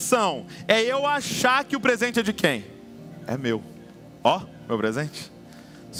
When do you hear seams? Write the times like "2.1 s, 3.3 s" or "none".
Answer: none